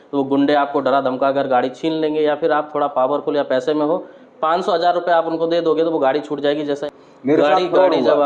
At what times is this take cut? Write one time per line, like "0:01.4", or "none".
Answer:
0:06.6